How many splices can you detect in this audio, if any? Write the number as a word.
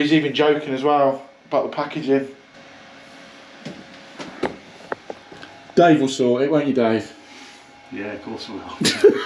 one